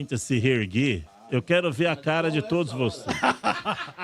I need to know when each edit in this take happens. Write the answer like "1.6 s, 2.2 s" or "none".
none